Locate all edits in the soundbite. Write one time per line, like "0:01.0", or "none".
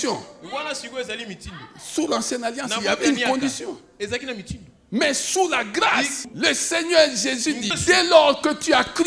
0:06.2
0:07.7